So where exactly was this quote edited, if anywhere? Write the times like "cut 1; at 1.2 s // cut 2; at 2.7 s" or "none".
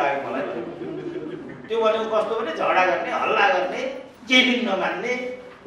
cut 1; at 1.6 s // cut 2; at 4.1 s

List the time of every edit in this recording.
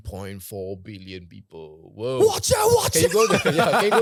none

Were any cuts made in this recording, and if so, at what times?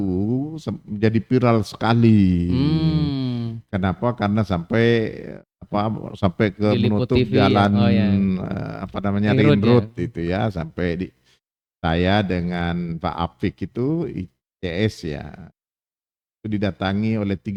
none

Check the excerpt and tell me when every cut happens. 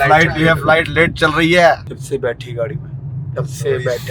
cut 1; at 1.9 s

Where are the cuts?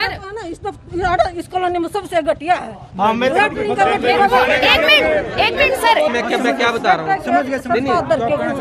cut 1; at 6.1 s

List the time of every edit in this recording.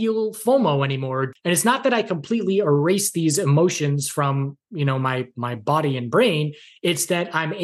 cut 1; at 1.2 s

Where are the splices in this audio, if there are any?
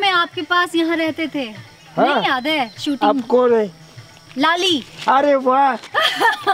none

